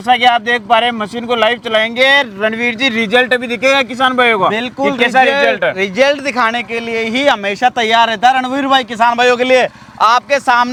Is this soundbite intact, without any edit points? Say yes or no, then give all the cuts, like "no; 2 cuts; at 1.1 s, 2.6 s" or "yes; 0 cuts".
yes; 0 cuts